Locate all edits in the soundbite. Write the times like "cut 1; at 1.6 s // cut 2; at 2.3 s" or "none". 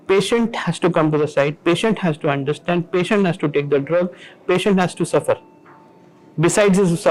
none